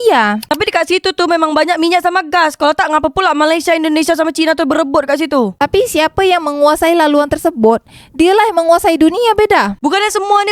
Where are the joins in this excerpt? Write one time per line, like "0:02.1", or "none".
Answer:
none